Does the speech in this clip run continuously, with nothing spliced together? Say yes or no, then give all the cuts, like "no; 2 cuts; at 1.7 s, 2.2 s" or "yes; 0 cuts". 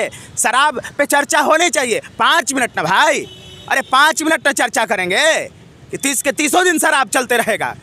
yes; 0 cuts